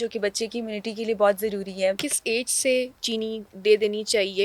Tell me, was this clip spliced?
yes; 2 cuts; at 2.1 s, 3.0 s

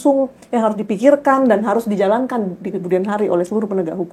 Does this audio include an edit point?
no; 0 cuts

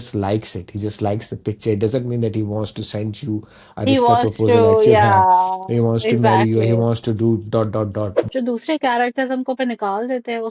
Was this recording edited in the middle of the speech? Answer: yes; 1 cut; at 8.2 s

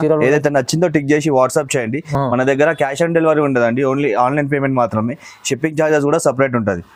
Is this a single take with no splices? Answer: yes; 0 cuts

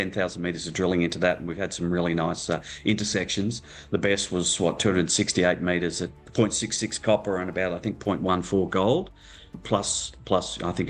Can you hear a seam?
yes; 2 cuts; at 6.2 s, 9.6 s

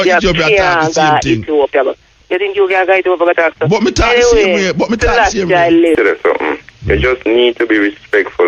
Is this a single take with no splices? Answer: no; 1 cut; at 6.0 s

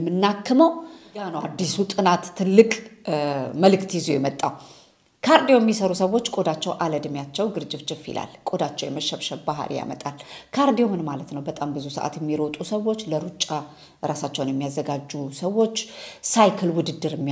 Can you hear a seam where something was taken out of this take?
yes; 1 cut; at 1.3 s

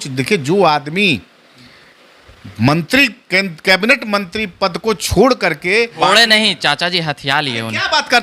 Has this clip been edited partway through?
yes; 1 cut; at 5.9 s

